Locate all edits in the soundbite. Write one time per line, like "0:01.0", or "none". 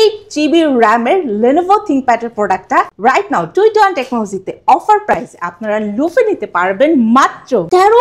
none